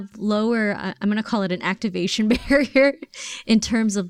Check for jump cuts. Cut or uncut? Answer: uncut